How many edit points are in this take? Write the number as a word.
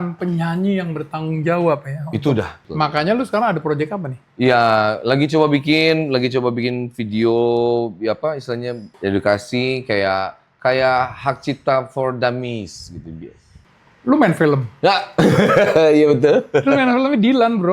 three